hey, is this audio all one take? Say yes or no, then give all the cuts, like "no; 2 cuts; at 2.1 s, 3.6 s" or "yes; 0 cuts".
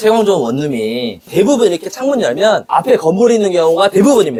yes; 0 cuts